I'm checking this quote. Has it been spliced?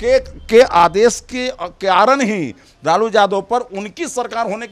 no; 0 cuts

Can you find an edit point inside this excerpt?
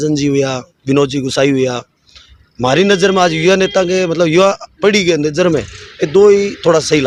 no; 0 cuts

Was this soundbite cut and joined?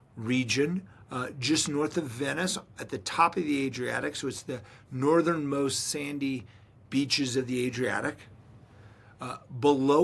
no; 0 cuts

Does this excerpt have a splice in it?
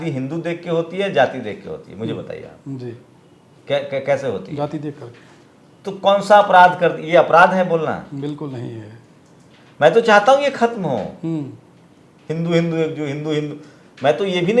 no; 0 cuts

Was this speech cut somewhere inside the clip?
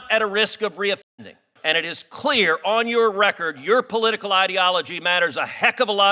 yes; 1 cut; at 1.5 s

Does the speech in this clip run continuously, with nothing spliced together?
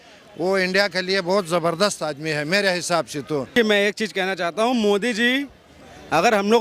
no; 1 cut; at 3.5 s

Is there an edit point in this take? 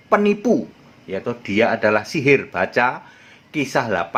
no; 0 cuts

